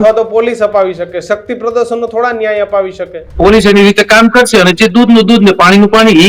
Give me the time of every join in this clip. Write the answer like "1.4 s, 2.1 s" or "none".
3.4 s